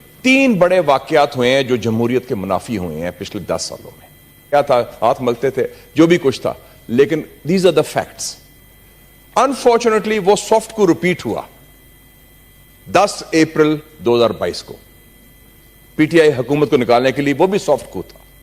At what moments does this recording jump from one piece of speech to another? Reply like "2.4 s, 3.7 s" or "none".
4.5 s